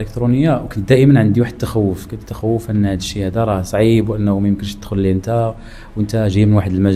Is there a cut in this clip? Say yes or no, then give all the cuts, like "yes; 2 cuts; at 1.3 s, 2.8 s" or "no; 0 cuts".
no; 0 cuts